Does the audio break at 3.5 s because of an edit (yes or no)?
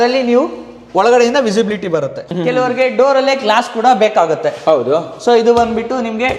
no